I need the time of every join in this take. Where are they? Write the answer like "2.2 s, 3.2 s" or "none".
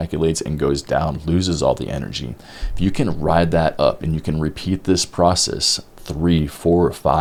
none